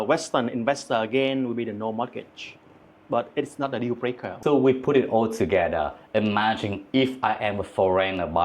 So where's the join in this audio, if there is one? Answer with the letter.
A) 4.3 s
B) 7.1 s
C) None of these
A